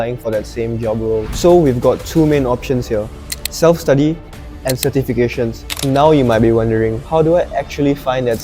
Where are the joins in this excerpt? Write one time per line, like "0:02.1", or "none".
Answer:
0:01.3
0:05.8